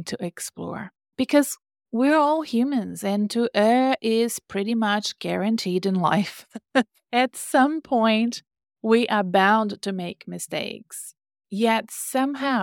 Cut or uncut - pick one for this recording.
cut